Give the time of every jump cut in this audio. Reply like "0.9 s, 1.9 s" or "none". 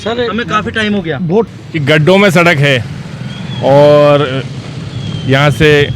1.5 s